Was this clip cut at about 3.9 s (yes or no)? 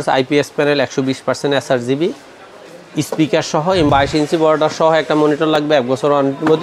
yes